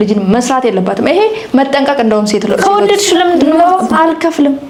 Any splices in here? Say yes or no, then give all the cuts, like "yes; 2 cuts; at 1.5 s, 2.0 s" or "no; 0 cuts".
no; 0 cuts